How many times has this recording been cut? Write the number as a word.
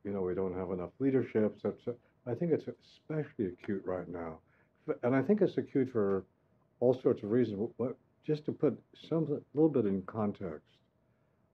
one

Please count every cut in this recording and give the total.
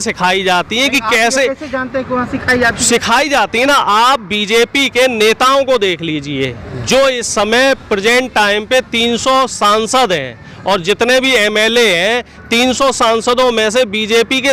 zero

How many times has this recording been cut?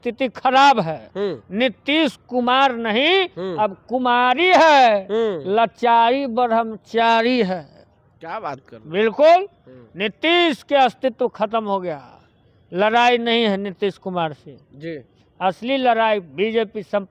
zero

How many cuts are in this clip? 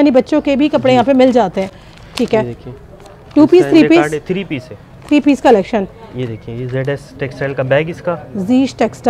zero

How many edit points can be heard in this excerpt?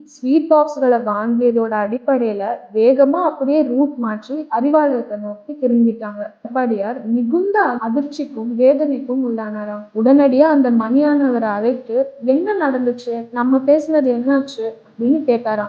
one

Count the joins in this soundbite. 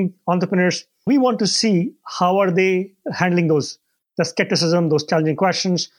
two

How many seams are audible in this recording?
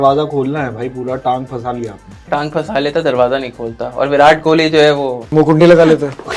two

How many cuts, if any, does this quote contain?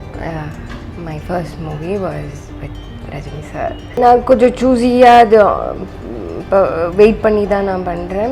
one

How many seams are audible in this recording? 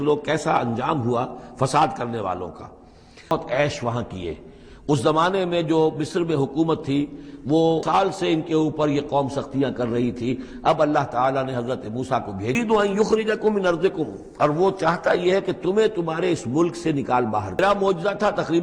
four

